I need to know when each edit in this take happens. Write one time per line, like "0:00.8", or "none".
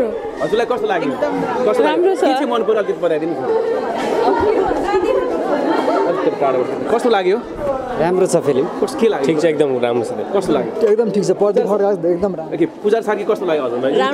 none